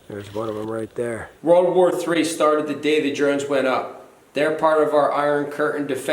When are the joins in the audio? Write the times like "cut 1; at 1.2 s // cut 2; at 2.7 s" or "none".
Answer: cut 1; at 1.3 s